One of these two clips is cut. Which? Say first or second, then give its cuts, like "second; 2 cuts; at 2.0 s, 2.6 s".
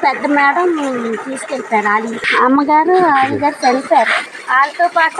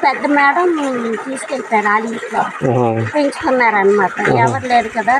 first; 2 cuts; at 2.3 s, 4.2 s